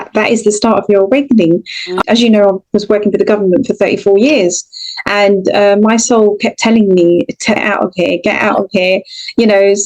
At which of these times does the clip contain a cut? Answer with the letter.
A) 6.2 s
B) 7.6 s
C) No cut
B